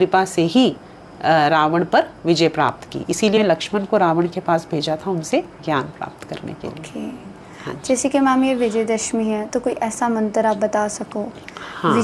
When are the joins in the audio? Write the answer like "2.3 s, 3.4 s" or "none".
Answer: 3.2 s